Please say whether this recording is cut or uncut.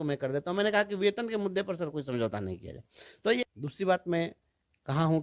cut